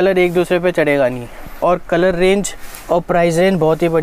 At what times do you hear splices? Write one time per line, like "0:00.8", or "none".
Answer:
none